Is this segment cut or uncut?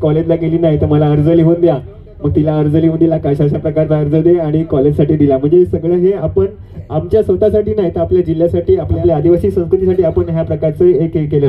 cut